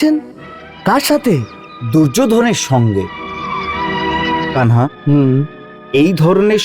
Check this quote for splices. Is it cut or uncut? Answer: cut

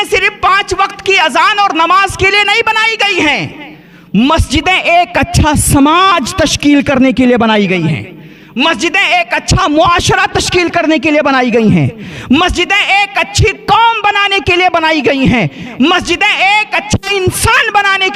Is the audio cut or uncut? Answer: uncut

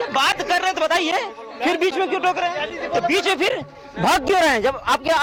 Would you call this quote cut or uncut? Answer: uncut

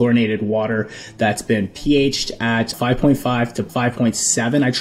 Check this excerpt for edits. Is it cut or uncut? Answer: cut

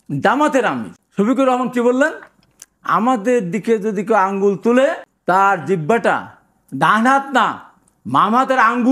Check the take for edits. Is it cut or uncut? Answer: cut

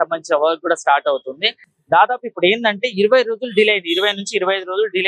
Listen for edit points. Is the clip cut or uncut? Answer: uncut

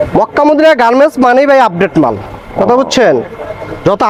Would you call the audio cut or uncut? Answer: uncut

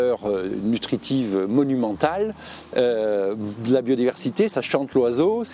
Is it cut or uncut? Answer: uncut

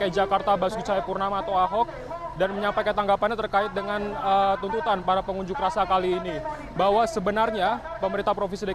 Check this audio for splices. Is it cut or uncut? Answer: cut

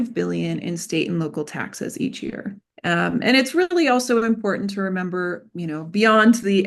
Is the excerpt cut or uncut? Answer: cut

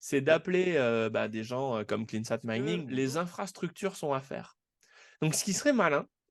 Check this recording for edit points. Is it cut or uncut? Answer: cut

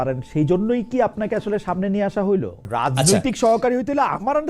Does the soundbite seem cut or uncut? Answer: cut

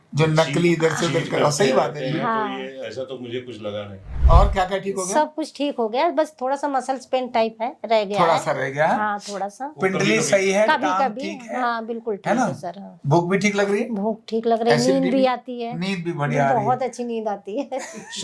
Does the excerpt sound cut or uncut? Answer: cut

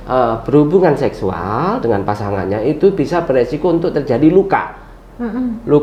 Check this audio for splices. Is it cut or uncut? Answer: uncut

